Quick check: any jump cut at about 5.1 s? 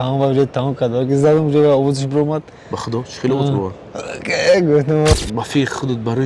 yes; 1 cut; at 5.1 s

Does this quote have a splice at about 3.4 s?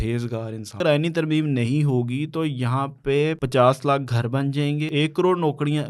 yes; 3 cuts; at 0.8 s, 3.4 s, 4.9 s

